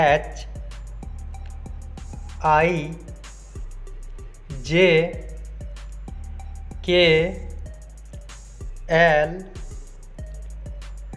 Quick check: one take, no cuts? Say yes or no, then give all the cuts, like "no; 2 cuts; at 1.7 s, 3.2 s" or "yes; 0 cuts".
no; 2 cuts; at 5.3 s, 6.8 s